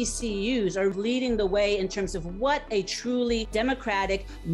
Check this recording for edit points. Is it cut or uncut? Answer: cut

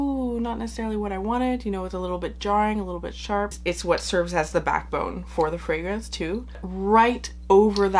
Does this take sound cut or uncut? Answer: cut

